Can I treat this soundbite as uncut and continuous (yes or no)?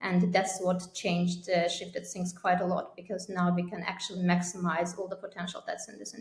yes